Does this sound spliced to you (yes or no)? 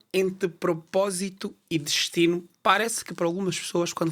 no